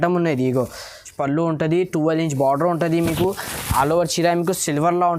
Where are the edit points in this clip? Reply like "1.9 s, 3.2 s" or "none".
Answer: 1.1 s